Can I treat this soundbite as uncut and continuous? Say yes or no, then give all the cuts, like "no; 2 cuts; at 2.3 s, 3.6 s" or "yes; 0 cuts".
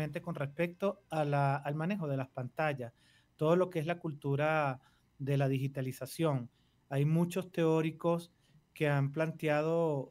yes; 0 cuts